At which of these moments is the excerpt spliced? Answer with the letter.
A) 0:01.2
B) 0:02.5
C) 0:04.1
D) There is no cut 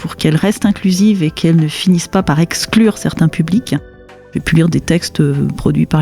C